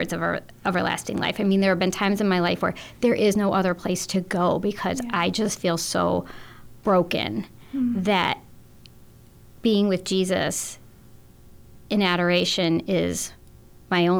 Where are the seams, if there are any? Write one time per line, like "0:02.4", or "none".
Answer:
none

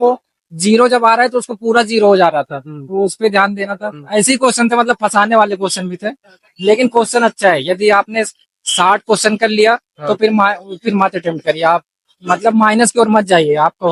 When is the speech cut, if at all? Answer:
none

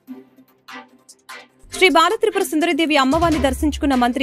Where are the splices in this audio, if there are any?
0:01.8

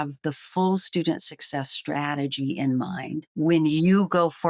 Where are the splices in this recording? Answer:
0:03.2

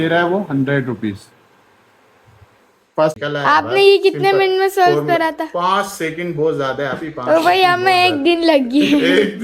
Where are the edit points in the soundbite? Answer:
0:03.2

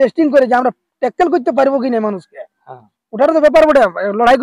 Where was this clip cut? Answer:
none

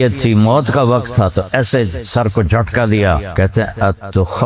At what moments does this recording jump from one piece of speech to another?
0:03.3

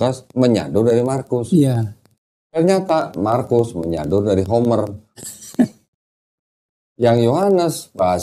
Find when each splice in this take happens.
none

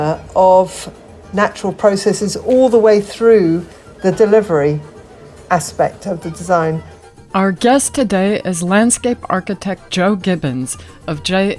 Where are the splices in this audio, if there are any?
0:07.0

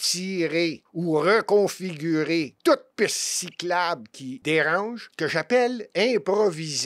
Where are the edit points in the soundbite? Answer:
0:00.9
0:02.5
0:04.3
0:05.0

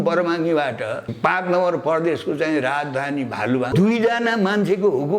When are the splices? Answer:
0:01.1
0:03.7

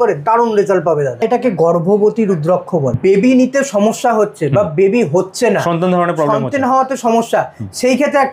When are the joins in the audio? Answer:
0:01.2
0:03.0

